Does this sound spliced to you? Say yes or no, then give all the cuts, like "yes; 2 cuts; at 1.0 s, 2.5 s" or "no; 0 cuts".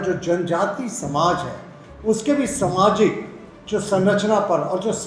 no; 0 cuts